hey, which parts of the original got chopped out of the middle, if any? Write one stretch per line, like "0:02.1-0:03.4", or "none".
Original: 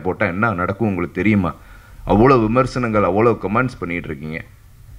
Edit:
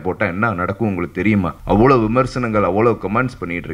0:01.6-0:02.0